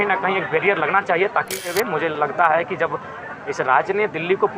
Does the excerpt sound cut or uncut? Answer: cut